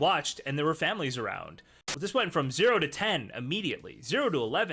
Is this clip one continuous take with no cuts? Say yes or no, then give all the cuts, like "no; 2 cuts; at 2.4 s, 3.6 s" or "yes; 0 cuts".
no; 1 cut; at 1.8 s